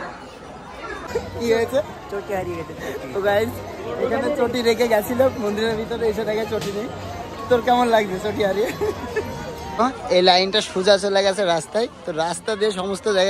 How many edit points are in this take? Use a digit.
2